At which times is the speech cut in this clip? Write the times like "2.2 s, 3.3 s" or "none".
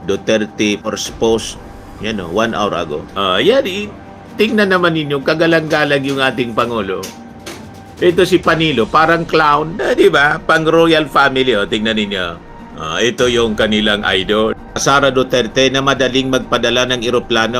3.0 s, 9.7 s, 14.7 s